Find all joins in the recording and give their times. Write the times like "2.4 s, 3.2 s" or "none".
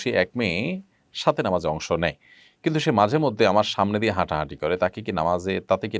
none